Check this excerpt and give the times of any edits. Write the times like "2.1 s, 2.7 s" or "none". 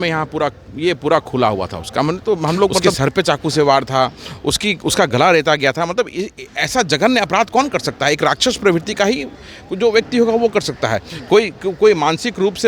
2.9 s